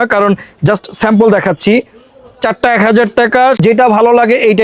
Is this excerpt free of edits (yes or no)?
no